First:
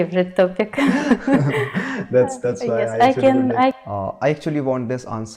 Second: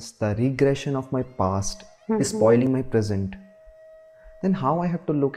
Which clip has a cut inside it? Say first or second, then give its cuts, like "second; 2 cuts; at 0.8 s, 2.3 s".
first; 1 cut; at 3.8 s